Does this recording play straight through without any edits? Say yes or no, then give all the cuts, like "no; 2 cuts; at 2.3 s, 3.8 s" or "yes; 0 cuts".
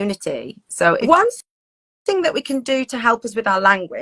no; 1 cut; at 1.0 s